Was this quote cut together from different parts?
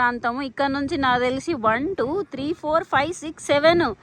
no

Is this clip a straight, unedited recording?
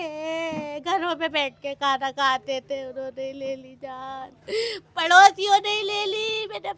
yes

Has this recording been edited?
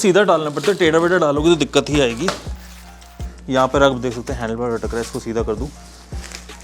no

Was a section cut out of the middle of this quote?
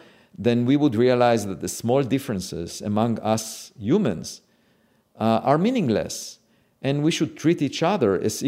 no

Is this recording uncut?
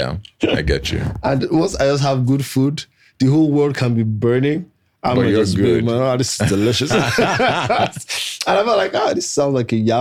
yes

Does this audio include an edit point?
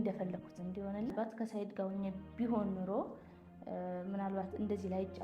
yes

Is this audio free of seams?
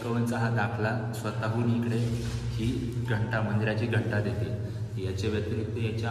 yes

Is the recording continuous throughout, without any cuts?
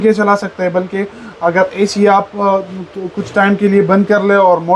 yes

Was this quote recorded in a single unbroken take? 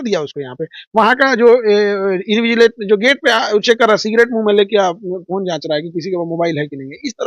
yes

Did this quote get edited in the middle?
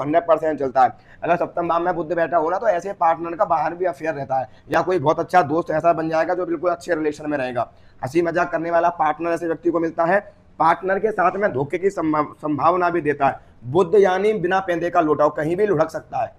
no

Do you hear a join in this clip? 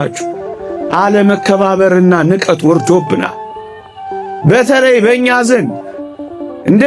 no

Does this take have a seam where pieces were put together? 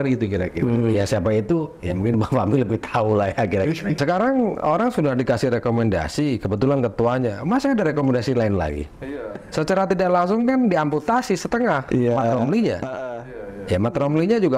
yes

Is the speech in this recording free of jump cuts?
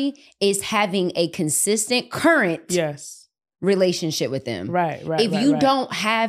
yes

